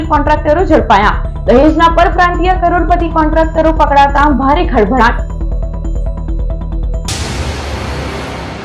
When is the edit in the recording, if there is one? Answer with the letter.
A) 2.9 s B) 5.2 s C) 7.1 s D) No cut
C